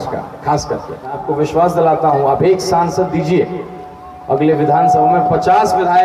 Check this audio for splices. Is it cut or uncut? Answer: cut